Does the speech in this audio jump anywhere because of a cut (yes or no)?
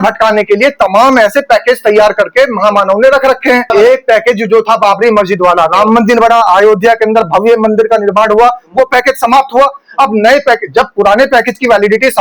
no